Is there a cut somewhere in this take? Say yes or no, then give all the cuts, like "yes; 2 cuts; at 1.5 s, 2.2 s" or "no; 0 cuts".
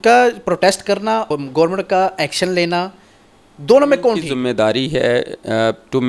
yes; 2 cuts; at 1.3 s, 4.3 s